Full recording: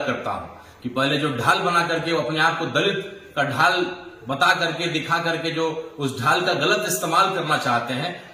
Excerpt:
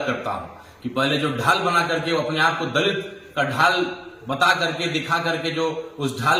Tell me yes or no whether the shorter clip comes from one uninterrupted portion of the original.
yes